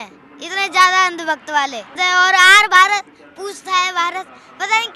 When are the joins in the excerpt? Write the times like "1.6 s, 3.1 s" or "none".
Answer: 1.9 s